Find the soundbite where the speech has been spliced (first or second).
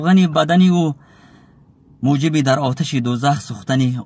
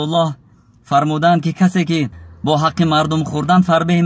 second